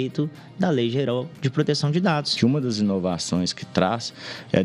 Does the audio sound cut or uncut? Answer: cut